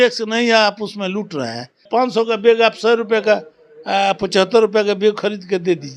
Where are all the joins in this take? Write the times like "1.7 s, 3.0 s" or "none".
1.8 s